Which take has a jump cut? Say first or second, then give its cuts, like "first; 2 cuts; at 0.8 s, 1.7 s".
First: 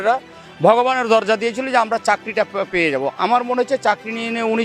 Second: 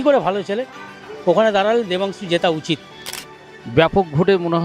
second; 1 cut; at 3.1 s